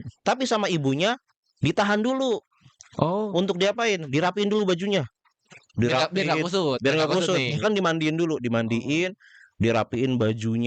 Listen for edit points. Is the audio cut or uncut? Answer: uncut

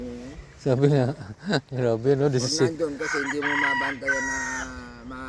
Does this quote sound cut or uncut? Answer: uncut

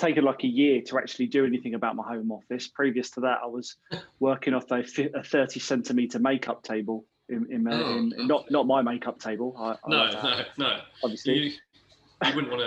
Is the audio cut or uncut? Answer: uncut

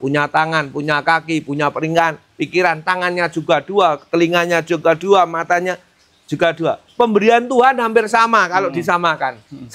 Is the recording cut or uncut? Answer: uncut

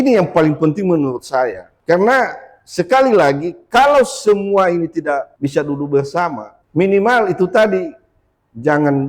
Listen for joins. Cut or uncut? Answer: cut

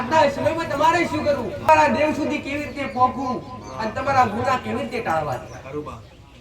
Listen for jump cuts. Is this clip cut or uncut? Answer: cut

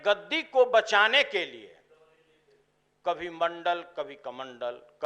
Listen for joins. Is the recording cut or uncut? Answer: uncut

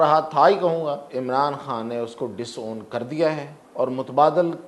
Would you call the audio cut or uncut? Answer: cut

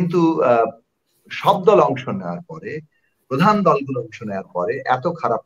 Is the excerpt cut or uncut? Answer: uncut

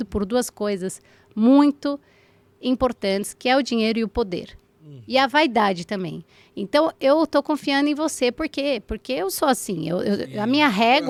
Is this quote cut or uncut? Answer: uncut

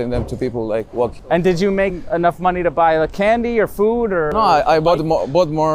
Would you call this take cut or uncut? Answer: cut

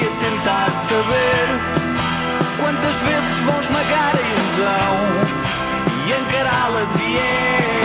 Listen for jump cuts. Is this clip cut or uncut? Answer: uncut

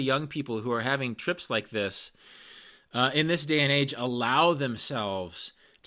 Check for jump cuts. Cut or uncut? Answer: uncut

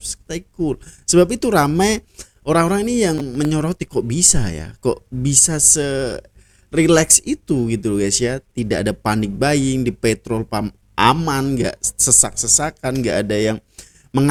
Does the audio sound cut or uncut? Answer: uncut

